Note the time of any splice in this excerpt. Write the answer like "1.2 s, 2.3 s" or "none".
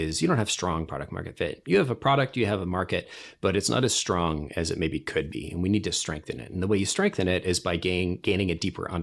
none

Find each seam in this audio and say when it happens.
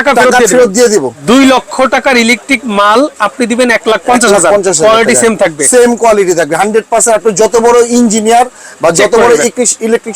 1.2 s

